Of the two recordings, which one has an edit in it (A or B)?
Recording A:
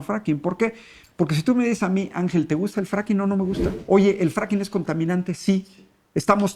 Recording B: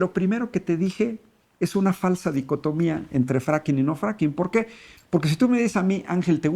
A